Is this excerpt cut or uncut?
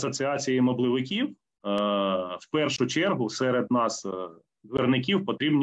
uncut